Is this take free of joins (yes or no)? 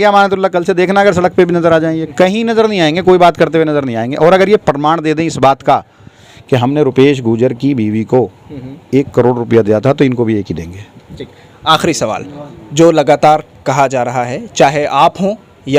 yes